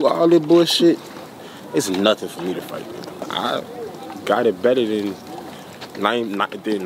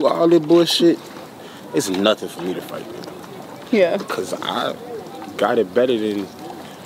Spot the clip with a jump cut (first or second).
first